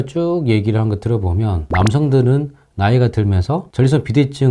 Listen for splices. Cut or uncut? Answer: cut